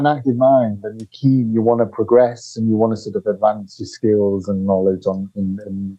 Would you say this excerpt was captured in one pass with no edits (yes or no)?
yes